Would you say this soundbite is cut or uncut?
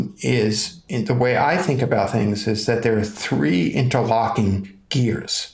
uncut